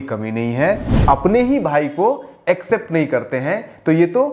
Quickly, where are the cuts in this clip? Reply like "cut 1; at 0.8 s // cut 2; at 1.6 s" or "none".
cut 1; at 0.9 s